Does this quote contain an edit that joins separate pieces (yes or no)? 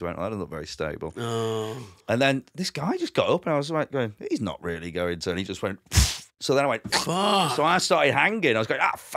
no